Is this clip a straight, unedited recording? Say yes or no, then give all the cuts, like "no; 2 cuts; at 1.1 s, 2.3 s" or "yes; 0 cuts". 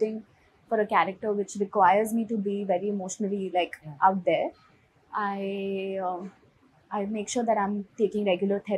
yes; 0 cuts